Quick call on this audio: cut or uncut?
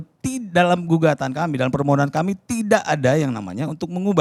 uncut